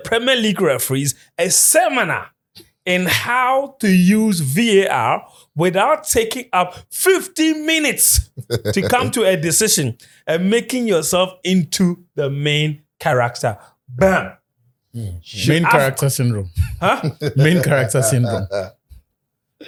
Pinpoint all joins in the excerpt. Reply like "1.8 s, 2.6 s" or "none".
none